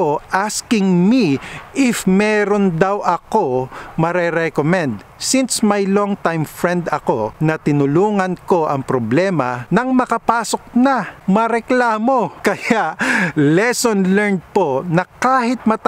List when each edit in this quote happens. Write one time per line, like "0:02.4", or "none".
0:07.3
0:09.6
0:11.1
0:12.3